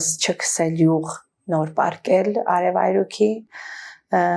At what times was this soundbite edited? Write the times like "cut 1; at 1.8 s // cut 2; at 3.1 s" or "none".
none

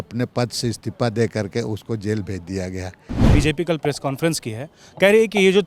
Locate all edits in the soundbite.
cut 1; at 3.3 s

